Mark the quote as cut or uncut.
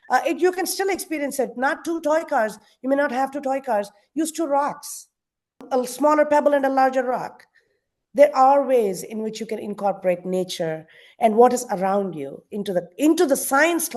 cut